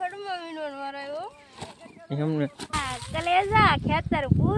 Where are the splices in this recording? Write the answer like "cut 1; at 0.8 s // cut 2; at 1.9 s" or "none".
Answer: cut 1; at 2.8 s